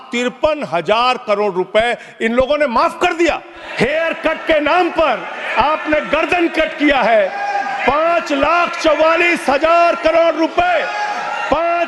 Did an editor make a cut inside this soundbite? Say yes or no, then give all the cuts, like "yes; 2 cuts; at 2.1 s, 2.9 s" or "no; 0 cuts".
yes; 1 cut; at 3.6 s